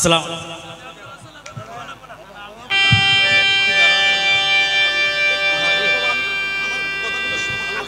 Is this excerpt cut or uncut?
uncut